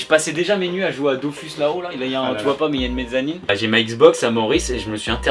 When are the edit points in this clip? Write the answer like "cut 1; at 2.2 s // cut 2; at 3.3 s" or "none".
cut 1; at 3.5 s